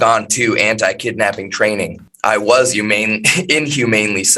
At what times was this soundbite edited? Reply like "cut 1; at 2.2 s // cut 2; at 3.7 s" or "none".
cut 1; at 2.1 s